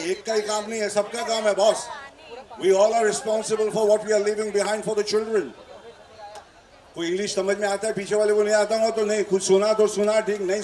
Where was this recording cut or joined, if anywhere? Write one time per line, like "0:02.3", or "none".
none